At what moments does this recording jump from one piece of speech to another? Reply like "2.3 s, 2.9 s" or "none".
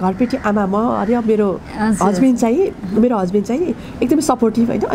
none